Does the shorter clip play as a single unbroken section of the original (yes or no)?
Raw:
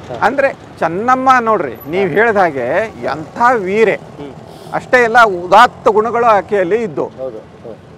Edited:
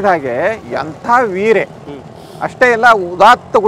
yes